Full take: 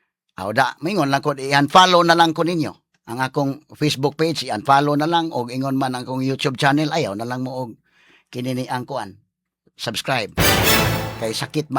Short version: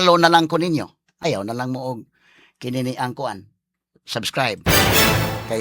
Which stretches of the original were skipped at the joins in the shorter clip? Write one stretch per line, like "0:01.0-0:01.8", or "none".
0:03.1-0:06.9